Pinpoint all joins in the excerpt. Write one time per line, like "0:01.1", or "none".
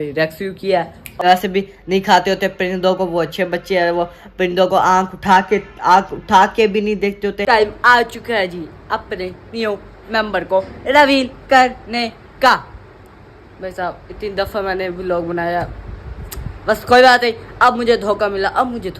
0:01.2
0:07.4